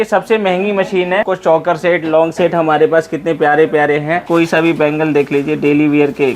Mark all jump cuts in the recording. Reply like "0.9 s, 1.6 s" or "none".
1.3 s, 4.2 s